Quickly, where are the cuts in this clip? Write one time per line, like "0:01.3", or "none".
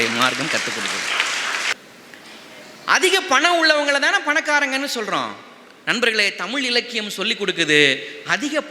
0:01.7